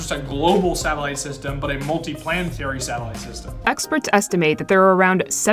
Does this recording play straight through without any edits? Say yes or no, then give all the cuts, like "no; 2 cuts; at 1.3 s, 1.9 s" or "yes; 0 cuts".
no; 1 cut; at 3.5 s